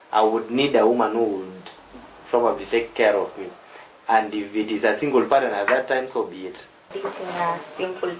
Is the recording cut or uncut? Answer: cut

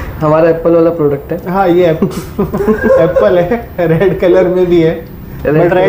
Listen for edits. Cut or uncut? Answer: uncut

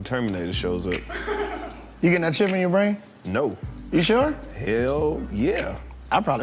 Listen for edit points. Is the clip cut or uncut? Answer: uncut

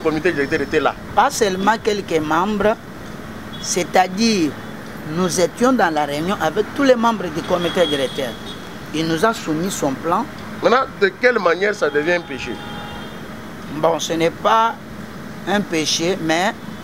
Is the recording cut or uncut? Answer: uncut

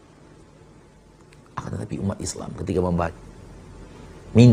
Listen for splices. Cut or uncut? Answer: cut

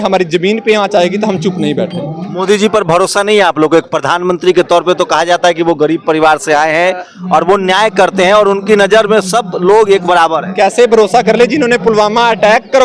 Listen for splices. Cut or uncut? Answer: uncut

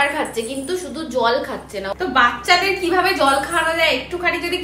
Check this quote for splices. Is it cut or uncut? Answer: cut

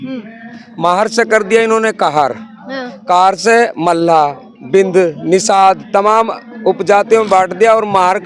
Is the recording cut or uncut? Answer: uncut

